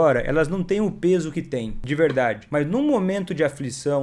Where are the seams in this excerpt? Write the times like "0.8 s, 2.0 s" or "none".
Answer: 1.8 s, 2.4 s

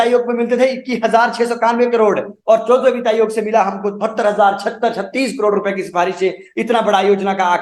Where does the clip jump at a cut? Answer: none

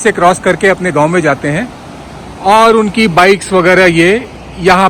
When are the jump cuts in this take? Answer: none

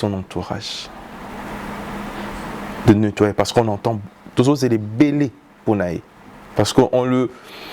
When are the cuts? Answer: none

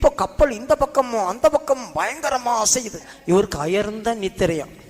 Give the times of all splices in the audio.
3.1 s

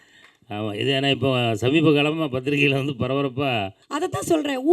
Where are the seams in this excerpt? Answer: 3.8 s

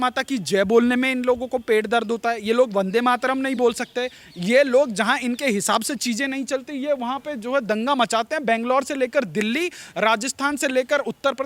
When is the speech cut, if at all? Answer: none

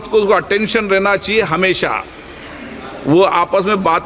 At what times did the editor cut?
none

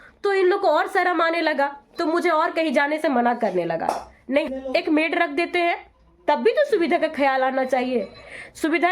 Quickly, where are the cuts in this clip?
4.5 s

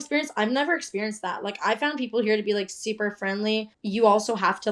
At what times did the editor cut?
3.7 s

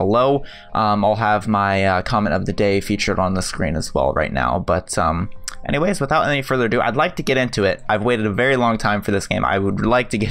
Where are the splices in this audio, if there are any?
6.0 s

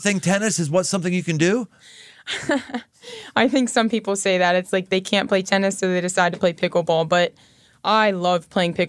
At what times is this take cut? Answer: none

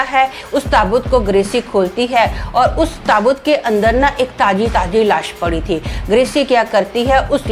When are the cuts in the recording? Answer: none

